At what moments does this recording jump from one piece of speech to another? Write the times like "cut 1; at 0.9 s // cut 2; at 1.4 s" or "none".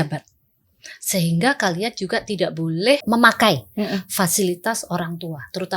cut 1; at 3.0 s